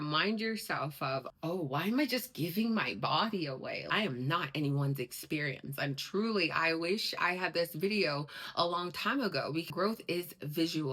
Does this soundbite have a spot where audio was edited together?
yes; 2 cuts; at 3.9 s, 9.7 s

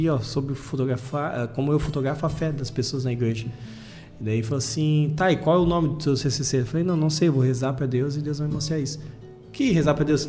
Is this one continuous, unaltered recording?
yes; 0 cuts

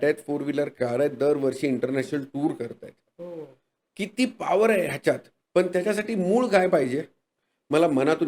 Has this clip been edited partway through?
no; 0 cuts

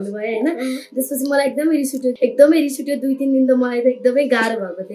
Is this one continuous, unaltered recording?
no; 1 cut; at 2.1 s

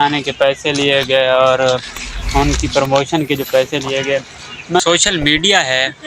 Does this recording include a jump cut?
yes; 1 cut; at 4.8 s

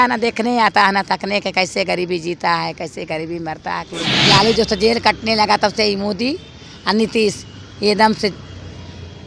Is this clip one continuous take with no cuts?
no; 1 cut; at 4.0 s

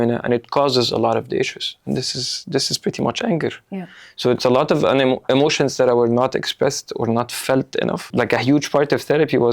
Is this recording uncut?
no; 1 cut; at 8.1 s

